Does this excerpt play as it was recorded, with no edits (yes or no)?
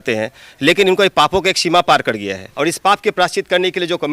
no